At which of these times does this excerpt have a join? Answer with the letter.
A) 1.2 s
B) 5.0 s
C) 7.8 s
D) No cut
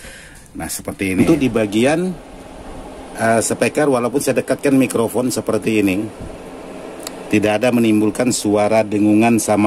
A